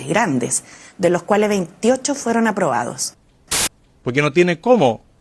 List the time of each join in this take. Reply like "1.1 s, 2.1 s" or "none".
3.4 s